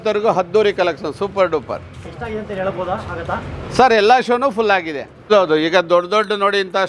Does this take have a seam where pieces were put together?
yes; 1 cut; at 5.3 s

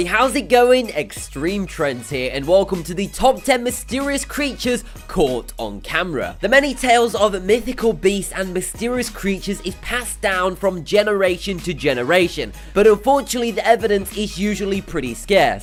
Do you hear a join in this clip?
no; 0 cuts

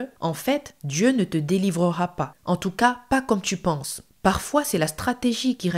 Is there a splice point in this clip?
yes; 1 cut; at 4.1 s

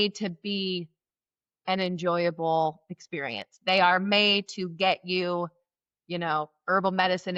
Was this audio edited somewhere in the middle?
no; 0 cuts

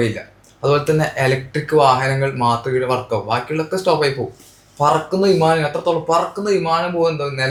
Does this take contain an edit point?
no; 0 cuts

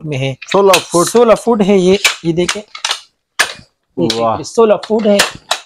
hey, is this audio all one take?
yes; 0 cuts

